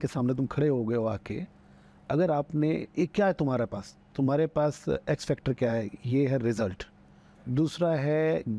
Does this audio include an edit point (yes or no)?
no